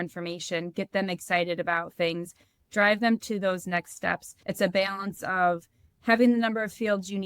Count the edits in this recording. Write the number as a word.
one